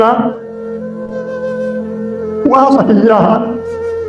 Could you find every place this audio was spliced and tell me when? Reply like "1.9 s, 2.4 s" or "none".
1.0 s, 2.4 s

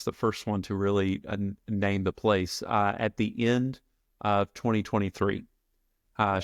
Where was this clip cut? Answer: none

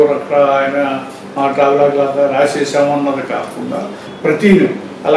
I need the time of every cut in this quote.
4.0 s

